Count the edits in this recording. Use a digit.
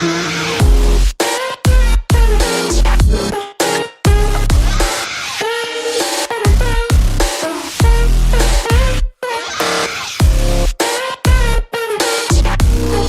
1